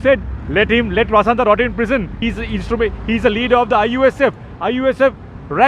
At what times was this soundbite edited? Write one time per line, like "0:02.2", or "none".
0:02.2